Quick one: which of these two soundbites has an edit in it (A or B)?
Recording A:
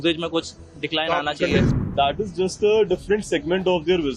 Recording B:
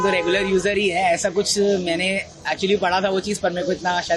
A